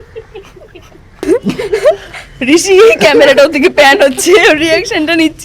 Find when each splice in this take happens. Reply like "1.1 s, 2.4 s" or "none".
1.3 s